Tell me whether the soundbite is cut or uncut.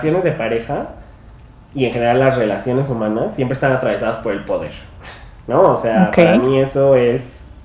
uncut